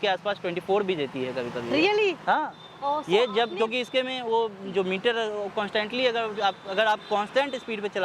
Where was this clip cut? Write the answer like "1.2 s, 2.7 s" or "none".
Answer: none